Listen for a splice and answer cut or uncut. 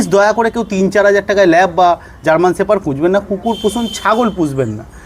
uncut